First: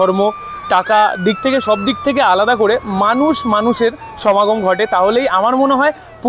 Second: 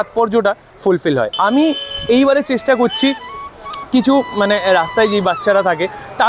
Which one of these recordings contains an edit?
second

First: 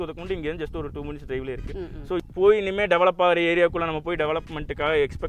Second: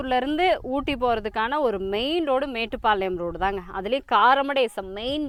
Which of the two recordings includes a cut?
first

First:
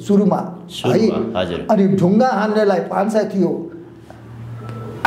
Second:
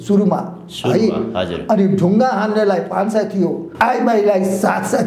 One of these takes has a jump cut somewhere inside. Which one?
second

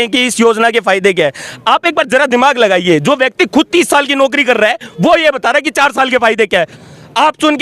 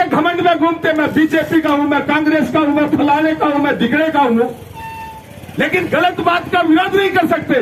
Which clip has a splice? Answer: first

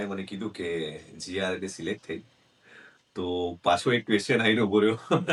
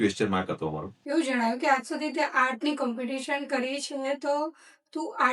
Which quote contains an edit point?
second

